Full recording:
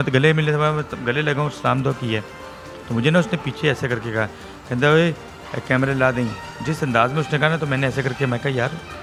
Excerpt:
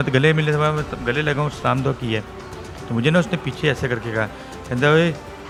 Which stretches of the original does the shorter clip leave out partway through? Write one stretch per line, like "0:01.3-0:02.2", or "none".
none